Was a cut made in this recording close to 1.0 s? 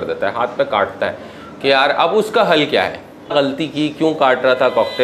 no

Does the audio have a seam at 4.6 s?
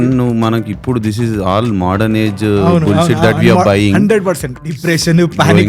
yes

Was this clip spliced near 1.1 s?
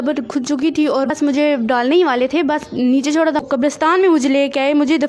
yes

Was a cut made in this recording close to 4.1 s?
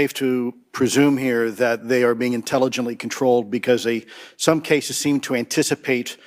no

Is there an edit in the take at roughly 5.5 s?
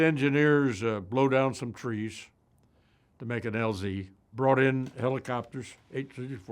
no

